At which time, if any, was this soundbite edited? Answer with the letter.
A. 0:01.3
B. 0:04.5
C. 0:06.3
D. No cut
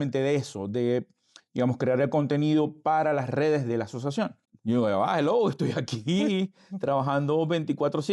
B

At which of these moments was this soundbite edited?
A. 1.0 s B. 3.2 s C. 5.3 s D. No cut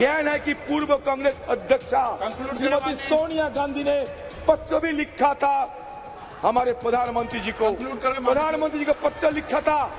D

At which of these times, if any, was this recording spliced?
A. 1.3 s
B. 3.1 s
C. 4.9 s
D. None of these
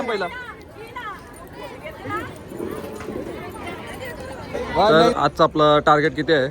C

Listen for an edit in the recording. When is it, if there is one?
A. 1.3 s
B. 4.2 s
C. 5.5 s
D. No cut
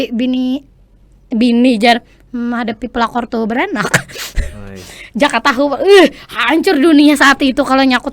D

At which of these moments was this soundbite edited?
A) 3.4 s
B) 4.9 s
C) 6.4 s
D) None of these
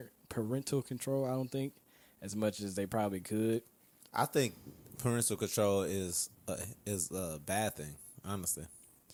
D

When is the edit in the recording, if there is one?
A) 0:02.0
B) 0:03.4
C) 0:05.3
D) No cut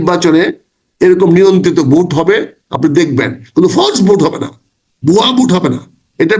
D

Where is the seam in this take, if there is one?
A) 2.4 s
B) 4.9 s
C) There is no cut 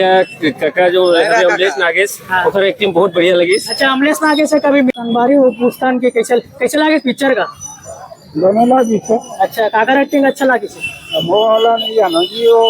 B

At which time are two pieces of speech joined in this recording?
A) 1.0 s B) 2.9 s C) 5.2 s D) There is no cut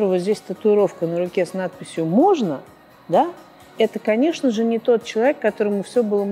D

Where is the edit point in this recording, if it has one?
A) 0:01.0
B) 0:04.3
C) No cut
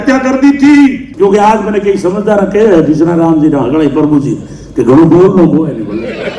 A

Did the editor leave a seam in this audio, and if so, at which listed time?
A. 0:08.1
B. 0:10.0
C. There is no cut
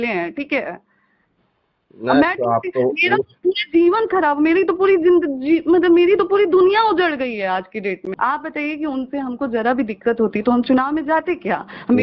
A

